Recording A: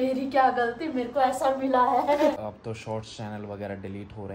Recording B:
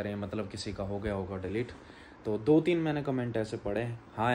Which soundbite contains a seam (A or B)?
A